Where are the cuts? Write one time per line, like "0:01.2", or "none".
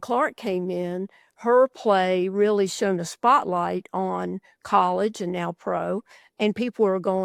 none